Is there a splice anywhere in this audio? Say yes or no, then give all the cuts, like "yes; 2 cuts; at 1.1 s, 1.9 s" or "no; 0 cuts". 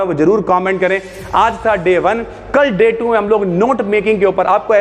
no; 0 cuts